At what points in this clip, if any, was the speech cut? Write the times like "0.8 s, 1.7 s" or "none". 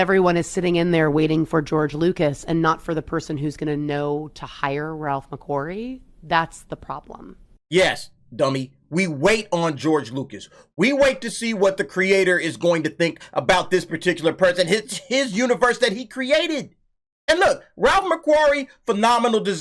none